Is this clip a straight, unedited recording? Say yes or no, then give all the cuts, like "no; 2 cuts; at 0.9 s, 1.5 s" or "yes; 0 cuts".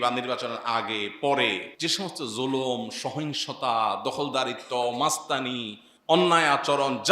no; 1 cut; at 1.7 s